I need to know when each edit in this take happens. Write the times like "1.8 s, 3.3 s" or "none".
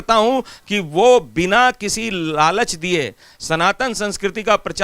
3.3 s